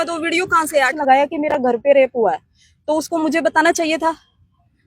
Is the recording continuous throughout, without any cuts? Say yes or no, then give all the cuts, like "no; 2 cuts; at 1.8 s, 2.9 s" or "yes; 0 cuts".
no; 1 cut; at 0.9 s